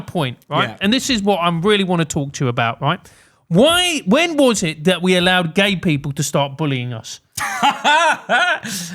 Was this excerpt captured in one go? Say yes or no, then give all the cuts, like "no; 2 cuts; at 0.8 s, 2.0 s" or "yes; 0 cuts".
yes; 0 cuts